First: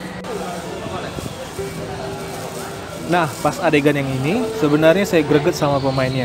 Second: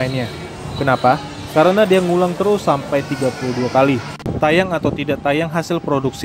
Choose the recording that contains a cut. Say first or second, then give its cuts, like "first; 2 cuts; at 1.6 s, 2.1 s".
second; 1 cut; at 4.2 s